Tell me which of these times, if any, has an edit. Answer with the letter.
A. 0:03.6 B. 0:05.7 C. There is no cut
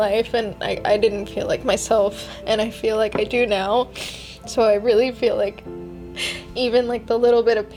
C